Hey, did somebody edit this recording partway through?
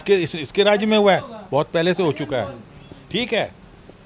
no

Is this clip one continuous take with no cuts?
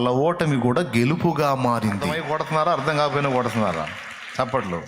no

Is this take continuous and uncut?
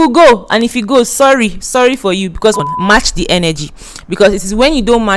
no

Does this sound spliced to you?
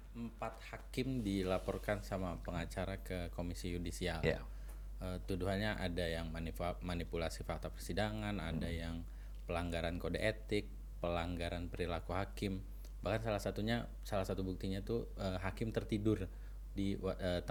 no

